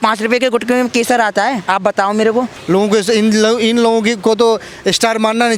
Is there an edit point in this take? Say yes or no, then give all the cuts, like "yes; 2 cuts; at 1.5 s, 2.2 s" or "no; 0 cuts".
yes; 1 cut; at 2.6 s